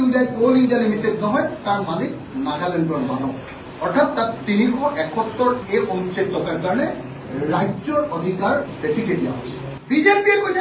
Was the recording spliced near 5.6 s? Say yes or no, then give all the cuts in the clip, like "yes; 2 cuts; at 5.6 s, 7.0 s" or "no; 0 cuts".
yes; 2 cuts; at 5.6 s, 8.7 s